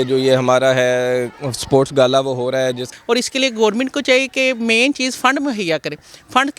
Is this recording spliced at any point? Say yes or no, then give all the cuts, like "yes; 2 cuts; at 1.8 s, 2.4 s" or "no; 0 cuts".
yes; 1 cut; at 2.9 s